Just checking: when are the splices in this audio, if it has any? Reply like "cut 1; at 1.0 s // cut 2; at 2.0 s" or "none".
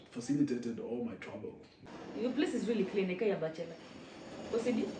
cut 1; at 1.8 s

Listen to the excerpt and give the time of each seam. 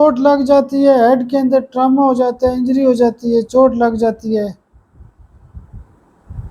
none

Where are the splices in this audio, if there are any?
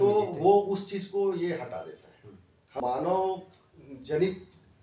cut 1; at 2.7 s

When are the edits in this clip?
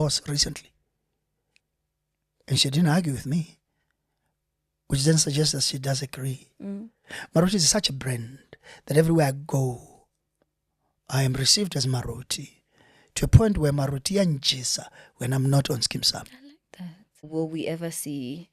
cut 1; at 17.3 s

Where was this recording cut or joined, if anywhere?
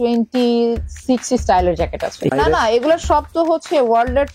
cut 1; at 2.3 s

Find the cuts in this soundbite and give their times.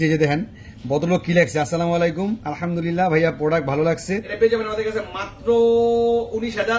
cut 1; at 4.3 s

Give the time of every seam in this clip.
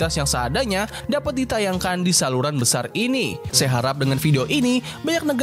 cut 1; at 3.4 s

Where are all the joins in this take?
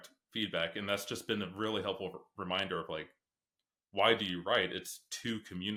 none

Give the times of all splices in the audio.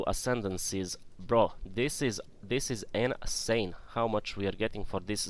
none

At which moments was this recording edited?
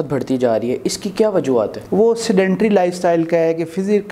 cut 1; at 1.8 s

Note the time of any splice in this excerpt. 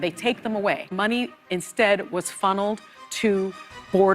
cut 1; at 0.9 s

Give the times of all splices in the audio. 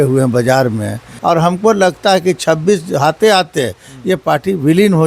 cut 1; at 1.1 s

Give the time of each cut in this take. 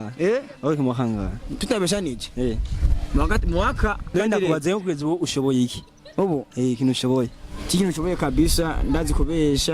cut 1; at 4.1 s

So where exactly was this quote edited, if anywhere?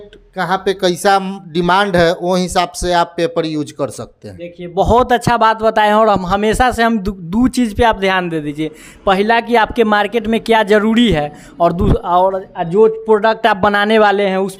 none

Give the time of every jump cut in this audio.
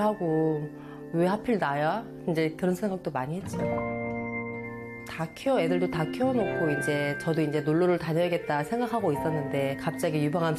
none

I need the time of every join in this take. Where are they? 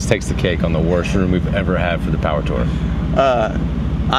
none

